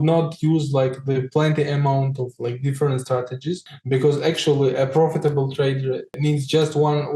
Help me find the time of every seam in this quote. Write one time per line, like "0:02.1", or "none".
0:06.1